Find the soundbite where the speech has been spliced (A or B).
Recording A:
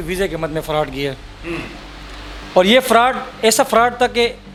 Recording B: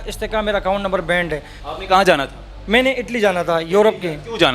B